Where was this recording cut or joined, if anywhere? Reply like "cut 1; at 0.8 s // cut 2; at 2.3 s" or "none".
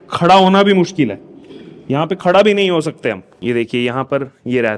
cut 1; at 3.3 s